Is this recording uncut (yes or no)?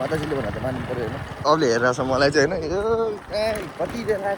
no